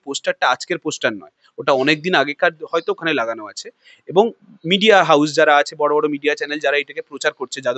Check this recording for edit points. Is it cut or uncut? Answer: uncut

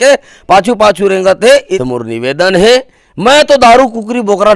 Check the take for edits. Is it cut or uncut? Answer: cut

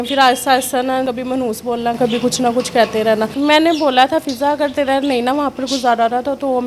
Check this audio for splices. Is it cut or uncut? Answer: cut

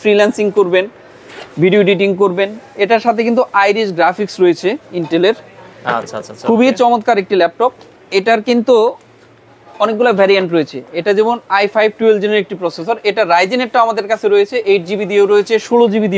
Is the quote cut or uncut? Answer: uncut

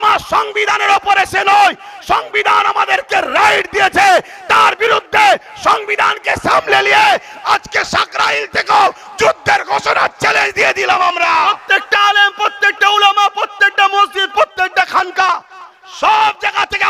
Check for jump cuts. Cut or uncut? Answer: cut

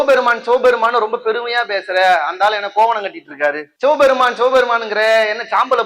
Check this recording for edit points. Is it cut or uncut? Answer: uncut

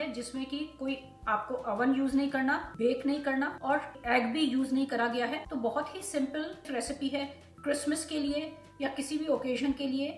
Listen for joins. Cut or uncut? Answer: uncut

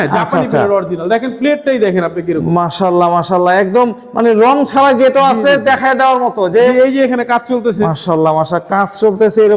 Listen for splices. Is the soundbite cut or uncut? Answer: uncut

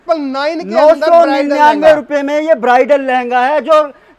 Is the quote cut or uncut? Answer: uncut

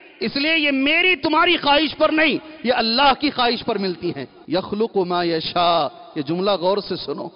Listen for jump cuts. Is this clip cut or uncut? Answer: cut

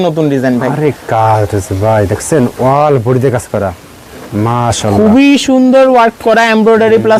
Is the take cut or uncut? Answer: uncut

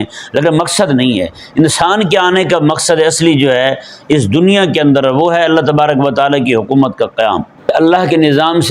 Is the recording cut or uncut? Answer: cut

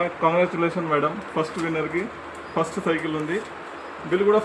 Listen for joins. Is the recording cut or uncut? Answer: uncut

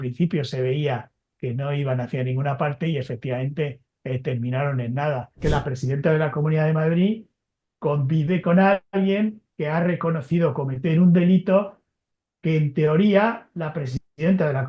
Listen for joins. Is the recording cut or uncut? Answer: cut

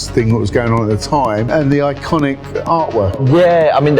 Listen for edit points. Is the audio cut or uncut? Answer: cut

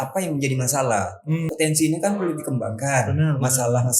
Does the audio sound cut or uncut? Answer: cut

